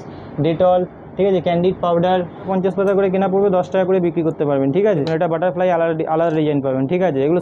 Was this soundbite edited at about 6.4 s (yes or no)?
no